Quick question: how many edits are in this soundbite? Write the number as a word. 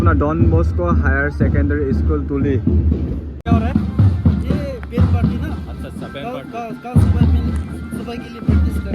one